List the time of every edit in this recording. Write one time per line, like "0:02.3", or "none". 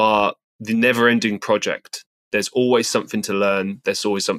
0:02.1